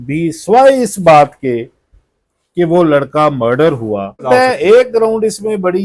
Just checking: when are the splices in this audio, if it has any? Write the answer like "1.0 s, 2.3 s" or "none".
4.2 s